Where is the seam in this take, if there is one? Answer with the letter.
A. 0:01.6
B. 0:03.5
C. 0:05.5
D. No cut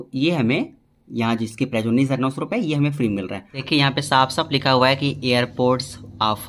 B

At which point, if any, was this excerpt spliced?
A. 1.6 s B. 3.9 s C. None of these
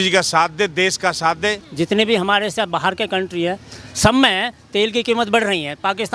A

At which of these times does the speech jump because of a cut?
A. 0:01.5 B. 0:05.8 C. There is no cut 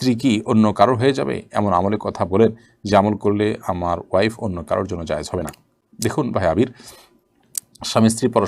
C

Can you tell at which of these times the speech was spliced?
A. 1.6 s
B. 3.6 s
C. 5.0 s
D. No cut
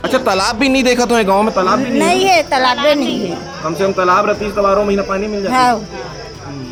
D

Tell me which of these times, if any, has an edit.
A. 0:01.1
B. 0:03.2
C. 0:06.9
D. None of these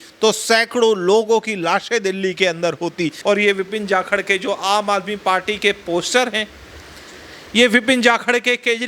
B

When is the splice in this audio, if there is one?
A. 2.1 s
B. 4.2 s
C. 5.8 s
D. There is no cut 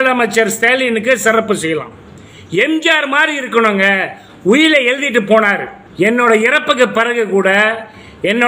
C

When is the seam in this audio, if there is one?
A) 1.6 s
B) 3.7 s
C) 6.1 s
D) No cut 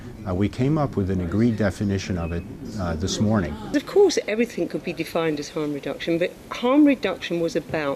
B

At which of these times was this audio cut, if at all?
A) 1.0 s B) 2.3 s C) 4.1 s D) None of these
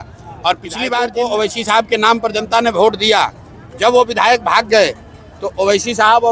A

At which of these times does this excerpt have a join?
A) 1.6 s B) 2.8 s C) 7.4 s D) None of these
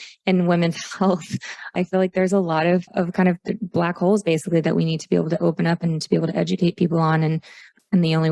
D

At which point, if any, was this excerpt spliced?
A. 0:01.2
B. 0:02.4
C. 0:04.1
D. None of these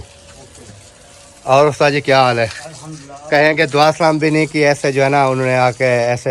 D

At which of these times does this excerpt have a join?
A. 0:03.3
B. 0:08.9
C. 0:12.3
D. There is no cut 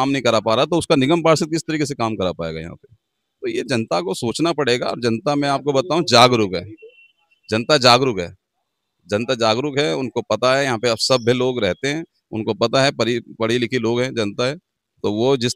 D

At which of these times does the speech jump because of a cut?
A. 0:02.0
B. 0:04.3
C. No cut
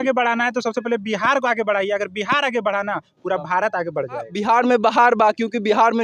B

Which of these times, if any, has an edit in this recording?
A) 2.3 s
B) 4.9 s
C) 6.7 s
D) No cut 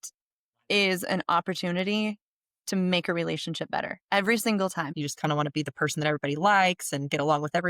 B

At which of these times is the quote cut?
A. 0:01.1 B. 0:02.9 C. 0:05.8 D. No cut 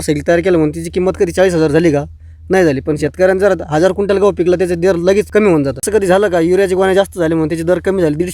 C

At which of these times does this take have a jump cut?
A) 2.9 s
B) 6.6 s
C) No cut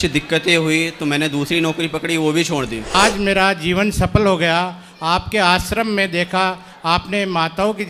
A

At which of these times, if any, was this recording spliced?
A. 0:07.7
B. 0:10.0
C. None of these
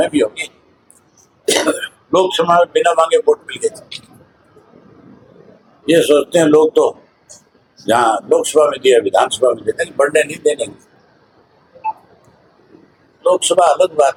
C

